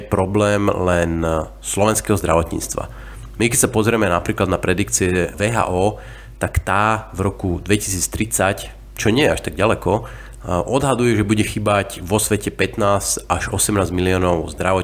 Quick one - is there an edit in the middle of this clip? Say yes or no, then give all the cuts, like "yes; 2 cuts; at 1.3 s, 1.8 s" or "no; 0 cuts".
no; 0 cuts